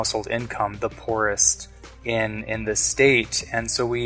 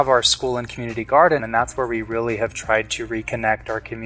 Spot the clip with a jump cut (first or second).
second